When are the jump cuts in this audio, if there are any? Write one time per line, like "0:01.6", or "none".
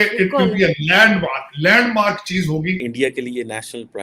0:02.8